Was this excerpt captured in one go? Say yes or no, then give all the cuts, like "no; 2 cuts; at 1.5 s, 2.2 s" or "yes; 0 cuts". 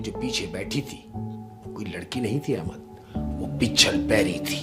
yes; 0 cuts